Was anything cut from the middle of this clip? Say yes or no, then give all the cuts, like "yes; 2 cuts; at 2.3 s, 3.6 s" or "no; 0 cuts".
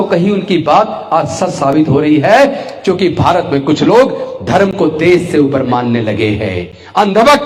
no; 0 cuts